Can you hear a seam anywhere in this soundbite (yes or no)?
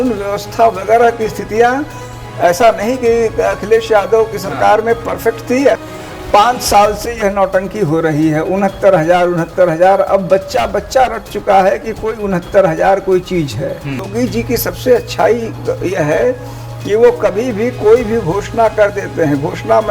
yes